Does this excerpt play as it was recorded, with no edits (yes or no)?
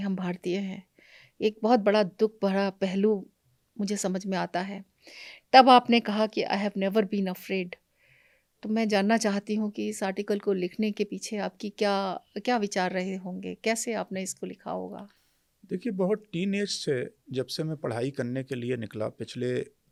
yes